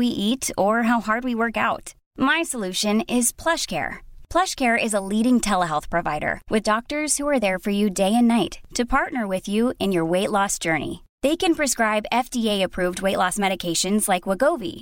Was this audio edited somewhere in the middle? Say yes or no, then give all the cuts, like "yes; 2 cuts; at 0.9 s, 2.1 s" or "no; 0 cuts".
no; 0 cuts